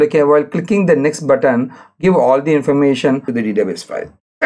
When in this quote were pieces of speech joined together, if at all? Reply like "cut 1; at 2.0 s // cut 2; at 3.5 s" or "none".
cut 1; at 3.3 s